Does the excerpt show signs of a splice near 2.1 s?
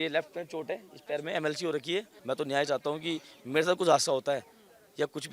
yes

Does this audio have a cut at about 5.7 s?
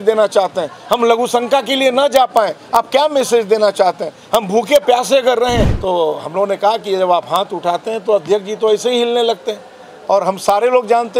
yes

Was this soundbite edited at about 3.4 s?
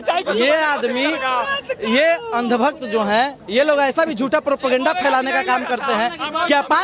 yes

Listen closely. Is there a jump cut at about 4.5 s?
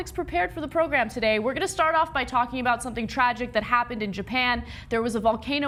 no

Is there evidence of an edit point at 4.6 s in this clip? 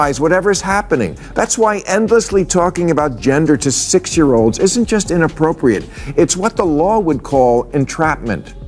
no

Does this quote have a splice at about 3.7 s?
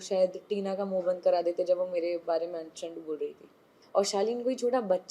yes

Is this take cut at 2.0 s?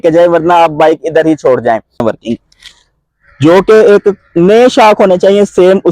yes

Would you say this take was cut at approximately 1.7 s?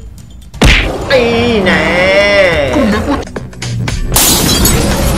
no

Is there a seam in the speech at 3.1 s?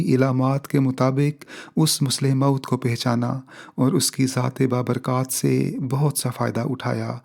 no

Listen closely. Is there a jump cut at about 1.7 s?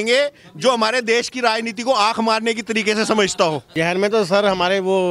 no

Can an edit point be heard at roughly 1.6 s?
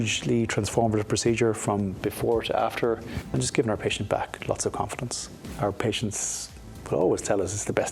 no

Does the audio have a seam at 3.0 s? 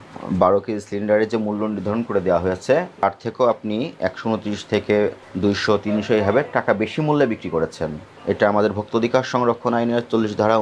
yes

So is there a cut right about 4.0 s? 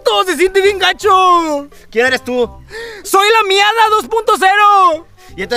no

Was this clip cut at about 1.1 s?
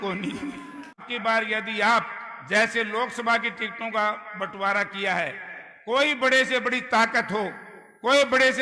yes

